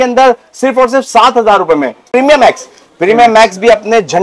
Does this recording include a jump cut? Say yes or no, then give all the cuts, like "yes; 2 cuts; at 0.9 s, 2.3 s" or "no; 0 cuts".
yes; 1 cut; at 2.1 s